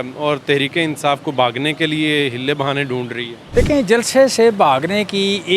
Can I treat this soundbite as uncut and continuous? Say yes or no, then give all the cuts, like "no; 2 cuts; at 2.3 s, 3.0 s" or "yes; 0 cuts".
no; 1 cut; at 3.3 s